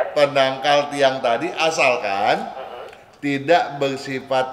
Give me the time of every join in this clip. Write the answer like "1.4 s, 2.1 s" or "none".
none